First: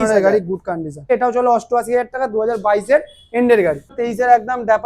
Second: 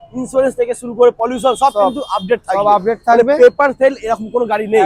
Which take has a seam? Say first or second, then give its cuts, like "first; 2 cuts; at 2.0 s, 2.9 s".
first; 2 cuts; at 1.0 s, 3.9 s